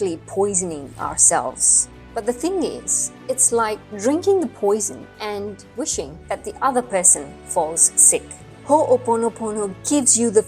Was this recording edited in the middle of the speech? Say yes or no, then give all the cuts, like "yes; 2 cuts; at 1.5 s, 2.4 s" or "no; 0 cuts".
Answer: no; 0 cuts